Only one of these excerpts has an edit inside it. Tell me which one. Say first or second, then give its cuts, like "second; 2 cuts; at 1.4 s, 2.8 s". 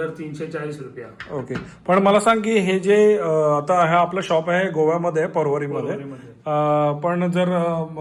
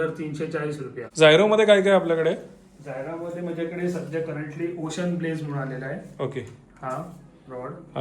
second; 1 cut; at 1.0 s